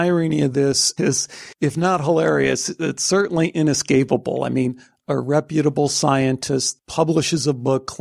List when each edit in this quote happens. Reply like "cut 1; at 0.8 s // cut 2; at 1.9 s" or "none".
cut 1; at 0.9 s // cut 2; at 6.7 s